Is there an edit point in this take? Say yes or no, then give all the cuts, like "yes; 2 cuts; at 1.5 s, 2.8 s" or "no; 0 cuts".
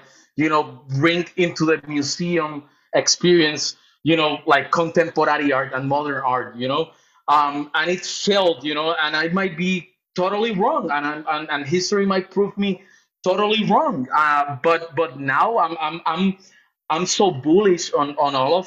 no; 0 cuts